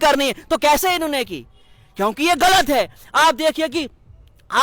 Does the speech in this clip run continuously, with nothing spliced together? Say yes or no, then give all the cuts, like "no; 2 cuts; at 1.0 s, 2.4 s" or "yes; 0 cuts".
yes; 0 cuts